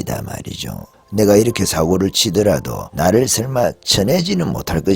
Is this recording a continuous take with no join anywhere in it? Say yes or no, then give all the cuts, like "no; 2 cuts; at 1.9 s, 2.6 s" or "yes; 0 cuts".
no; 1 cut; at 2.8 s